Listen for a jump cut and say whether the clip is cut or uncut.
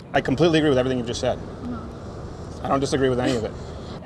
uncut